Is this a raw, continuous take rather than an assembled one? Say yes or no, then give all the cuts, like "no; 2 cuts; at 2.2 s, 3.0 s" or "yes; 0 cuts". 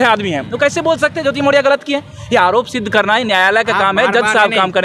yes; 0 cuts